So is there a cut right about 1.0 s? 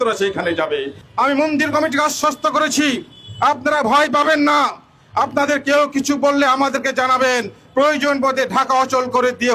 yes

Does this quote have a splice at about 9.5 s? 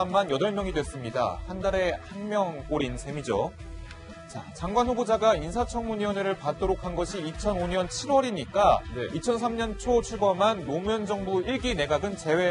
no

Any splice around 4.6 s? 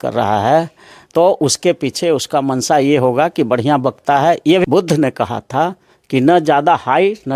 yes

